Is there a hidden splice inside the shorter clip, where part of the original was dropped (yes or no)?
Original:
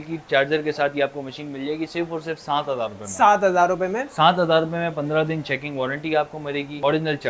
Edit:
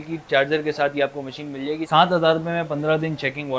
yes